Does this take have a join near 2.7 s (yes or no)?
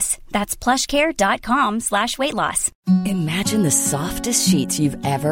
yes